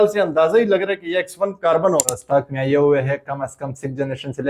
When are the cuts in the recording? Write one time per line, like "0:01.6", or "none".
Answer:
0:02.2